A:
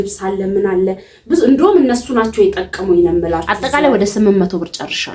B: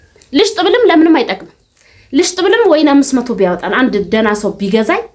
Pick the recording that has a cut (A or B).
A